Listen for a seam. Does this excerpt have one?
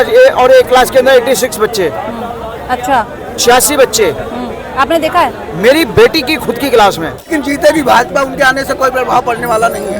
yes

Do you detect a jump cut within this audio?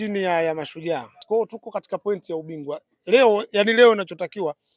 yes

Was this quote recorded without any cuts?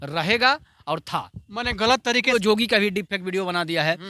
no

